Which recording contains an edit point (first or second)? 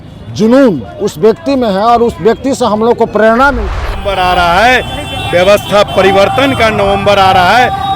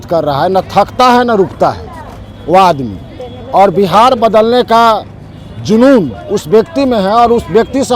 first